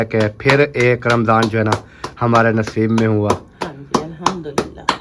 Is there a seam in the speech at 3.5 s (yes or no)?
no